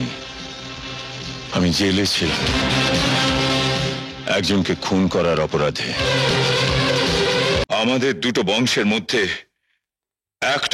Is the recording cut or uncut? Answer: cut